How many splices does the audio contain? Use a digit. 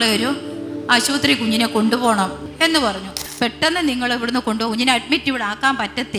2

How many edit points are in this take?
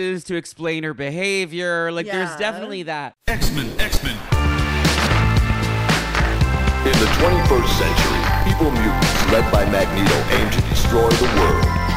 1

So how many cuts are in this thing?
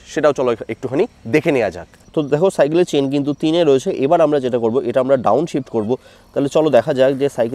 0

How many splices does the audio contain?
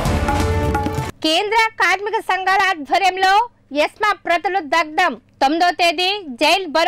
1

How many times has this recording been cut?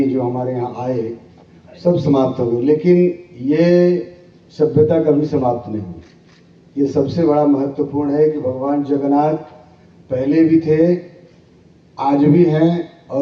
0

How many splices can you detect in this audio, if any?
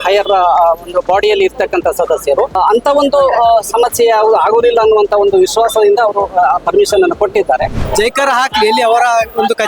2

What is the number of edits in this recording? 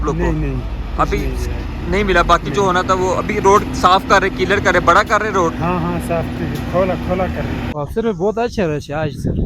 1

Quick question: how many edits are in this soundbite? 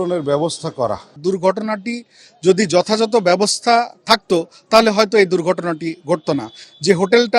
1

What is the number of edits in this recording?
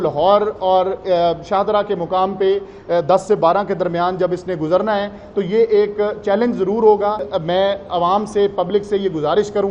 1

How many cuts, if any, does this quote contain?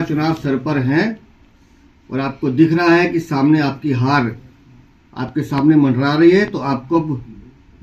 0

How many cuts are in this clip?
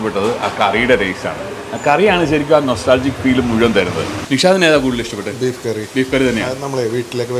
1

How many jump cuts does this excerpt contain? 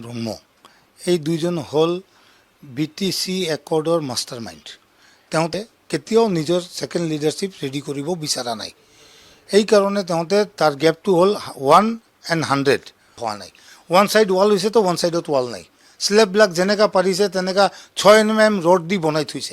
2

